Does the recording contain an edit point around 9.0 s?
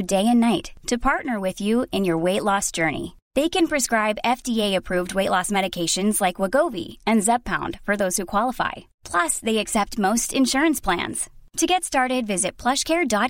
no; 0 cuts

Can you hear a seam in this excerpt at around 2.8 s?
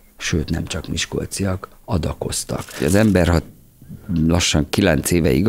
yes; 1 cut; at 2.8 s

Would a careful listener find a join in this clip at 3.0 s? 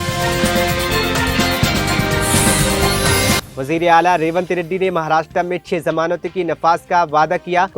yes; 1 cut; at 3.0 s

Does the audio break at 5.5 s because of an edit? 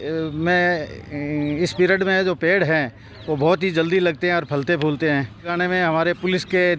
yes; 1 cut; at 5.5 s

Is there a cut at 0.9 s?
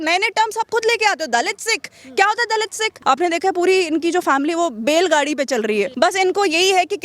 no; 2 cuts; at 2.9 s, 5.9 s

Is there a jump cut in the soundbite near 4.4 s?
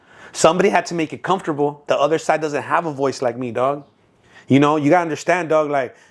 no; 1 cut; at 1.8 s

